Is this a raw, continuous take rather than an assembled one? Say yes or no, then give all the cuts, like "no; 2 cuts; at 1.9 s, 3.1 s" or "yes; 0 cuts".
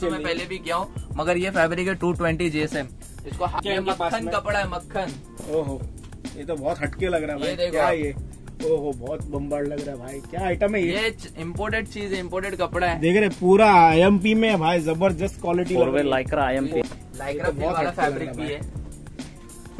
no; 2 cuts; at 3.6 s, 16.8 s